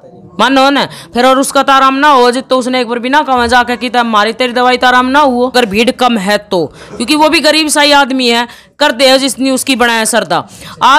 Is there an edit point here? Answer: yes; 1 cut; at 5.5 s

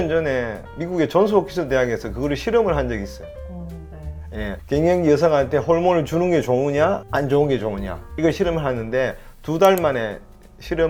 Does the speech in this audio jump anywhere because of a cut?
no; 0 cuts

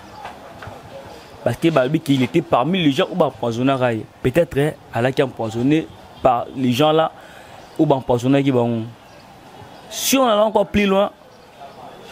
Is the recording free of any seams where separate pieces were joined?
yes; 0 cuts

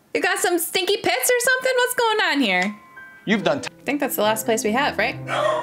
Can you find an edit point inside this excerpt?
yes; 1 cut; at 3.6 s

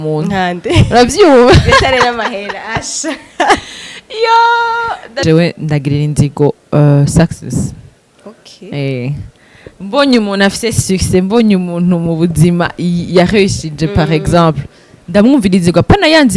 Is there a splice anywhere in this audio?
yes; 1 cut; at 5.2 s

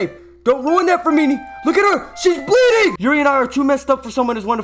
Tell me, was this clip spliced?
yes; 1 cut; at 3.0 s

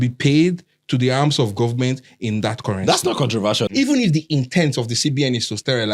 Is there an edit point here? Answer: yes; 1 cut; at 3.7 s

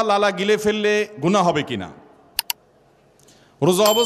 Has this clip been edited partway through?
no; 0 cuts

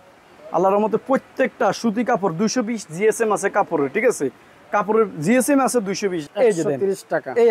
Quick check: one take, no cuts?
no; 1 cut; at 6.2 s

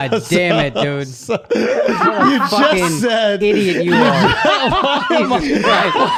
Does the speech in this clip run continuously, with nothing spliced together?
yes; 0 cuts

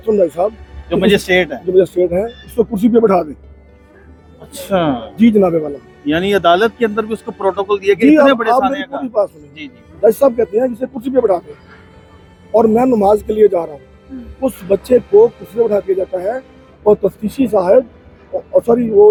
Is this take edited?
no; 0 cuts

